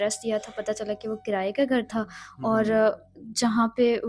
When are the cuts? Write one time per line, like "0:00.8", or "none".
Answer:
none